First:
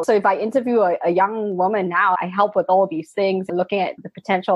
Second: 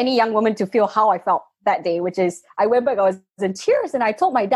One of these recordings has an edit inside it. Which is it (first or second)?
first